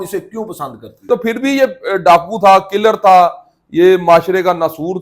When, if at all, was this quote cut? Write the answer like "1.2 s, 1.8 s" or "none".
1.1 s